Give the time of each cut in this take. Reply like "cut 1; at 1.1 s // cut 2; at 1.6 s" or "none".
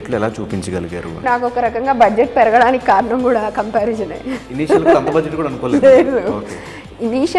cut 1; at 1.2 s